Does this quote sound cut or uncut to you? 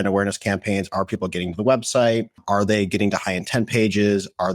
cut